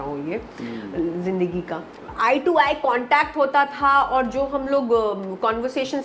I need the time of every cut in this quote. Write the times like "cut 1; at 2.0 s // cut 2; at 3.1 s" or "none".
cut 1; at 1.9 s

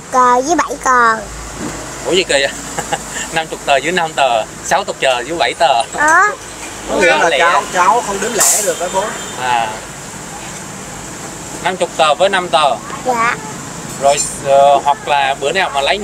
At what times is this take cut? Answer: none

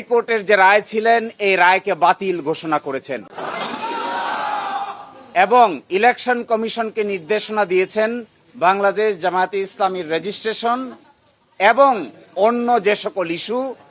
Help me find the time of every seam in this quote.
cut 1; at 3.3 s

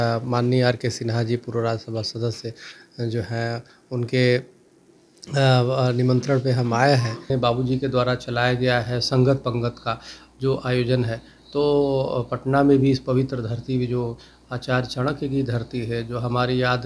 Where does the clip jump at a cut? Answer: cut 1; at 7.3 s

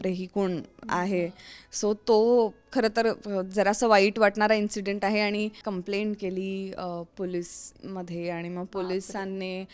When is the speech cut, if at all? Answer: cut 1; at 5.6 s

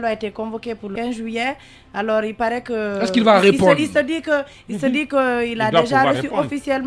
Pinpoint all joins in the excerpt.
cut 1; at 0.9 s

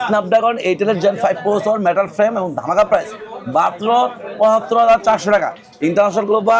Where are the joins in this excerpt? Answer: none

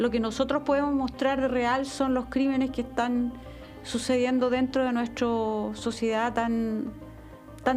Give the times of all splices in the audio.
none

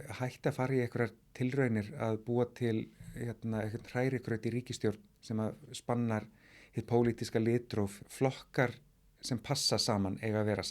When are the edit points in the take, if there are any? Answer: cut 1; at 8.0 s

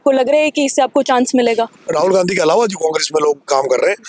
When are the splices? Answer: cut 1; at 1.8 s

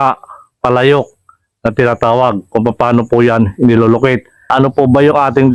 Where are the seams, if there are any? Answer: cut 1; at 4.5 s

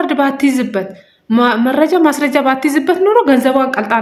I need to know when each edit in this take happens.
none

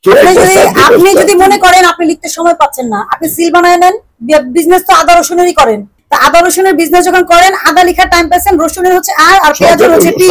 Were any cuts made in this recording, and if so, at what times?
cut 1; at 5.9 s

